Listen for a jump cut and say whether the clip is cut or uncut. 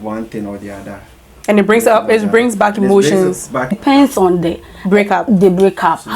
cut